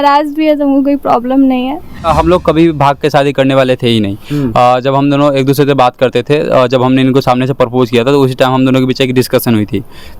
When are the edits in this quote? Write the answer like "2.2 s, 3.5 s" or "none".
2.0 s